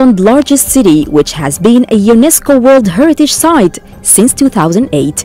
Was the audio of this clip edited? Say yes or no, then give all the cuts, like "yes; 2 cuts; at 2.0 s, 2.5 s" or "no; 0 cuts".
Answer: no; 0 cuts